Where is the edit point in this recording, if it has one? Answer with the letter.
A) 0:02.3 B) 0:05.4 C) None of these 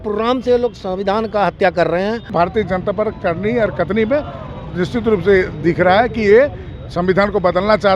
A